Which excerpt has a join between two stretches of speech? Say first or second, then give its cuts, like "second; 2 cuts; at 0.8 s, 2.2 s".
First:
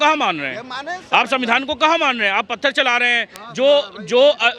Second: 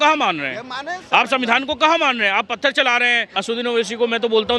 second; 1 cut; at 3.4 s